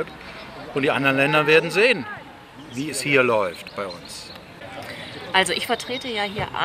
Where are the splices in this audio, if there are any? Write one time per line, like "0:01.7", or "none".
0:04.9